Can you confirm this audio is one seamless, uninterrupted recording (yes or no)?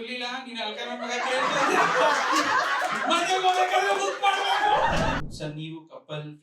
no